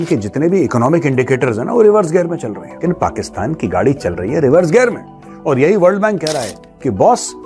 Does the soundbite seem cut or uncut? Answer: cut